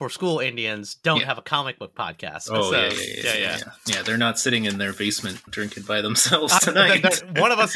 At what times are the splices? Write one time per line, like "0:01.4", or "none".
0:02.4
0:05.4